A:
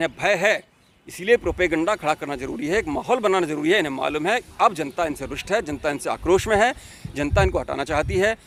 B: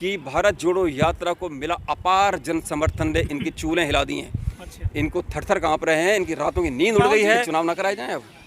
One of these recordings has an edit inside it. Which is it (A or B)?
B